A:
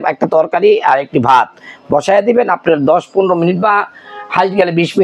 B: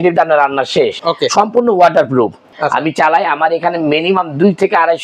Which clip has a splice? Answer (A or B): B